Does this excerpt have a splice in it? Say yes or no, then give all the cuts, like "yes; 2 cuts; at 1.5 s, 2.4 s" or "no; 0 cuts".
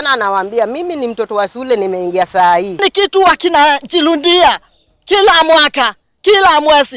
yes; 1 cut; at 2.7 s